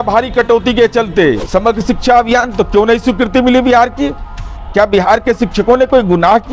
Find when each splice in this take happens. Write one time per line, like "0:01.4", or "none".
0:01.4